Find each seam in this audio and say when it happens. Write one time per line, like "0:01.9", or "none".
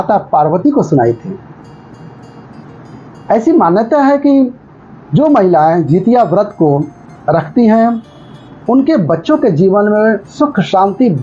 0:01.8